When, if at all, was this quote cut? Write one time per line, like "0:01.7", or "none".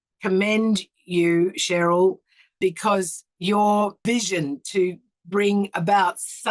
0:02.6
0:04.0